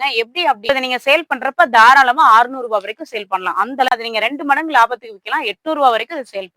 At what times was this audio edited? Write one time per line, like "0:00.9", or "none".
0:00.7
0:03.9